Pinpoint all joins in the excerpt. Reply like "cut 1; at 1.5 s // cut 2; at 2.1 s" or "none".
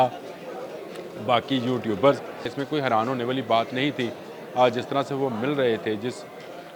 cut 1; at 2.6 s